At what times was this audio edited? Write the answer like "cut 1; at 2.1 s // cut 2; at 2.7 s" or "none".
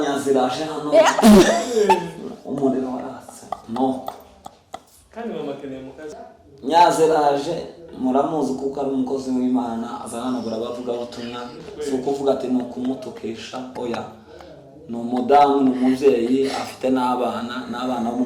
cut 1; at 6.2 s

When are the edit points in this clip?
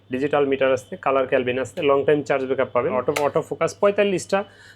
cut 1; at 2.9 s

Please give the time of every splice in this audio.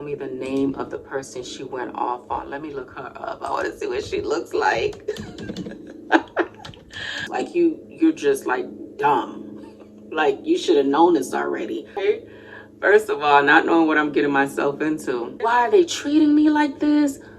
cut 1; at 7.3 s // cut 2; at 12.0 s // cut 3; at 15.5 s

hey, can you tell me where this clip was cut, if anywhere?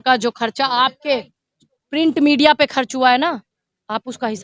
none

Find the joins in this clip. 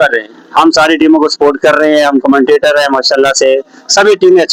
none

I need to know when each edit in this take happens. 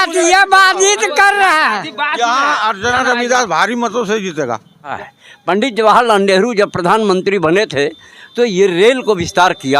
cut 1; at 5.0 s

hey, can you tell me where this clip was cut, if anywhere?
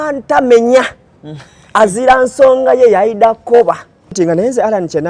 cut 1; at 4.2 s

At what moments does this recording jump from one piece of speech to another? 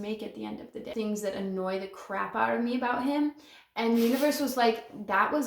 cut 1; at 0.9 s

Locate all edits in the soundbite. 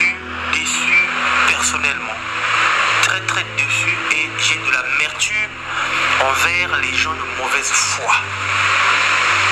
none

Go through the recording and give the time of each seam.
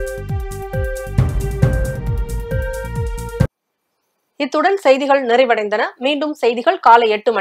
none

